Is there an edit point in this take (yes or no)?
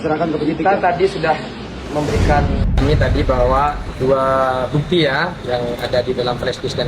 yes